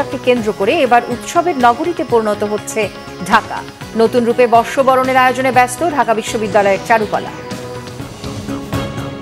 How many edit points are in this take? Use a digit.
1